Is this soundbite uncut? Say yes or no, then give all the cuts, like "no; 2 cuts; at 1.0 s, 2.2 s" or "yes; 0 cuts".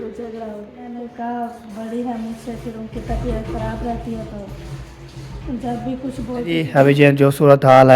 no; 2 cuts; at 0.9 s, 6.4 s